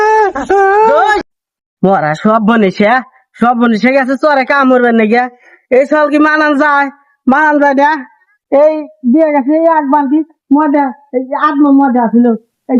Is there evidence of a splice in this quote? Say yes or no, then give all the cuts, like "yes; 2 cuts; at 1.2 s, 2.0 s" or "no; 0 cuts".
yes; 1 cut; at 1.2 s